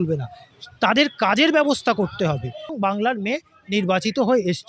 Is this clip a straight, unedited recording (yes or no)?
no